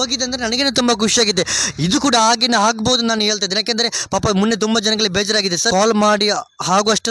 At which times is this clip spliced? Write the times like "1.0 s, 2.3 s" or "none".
5.7 s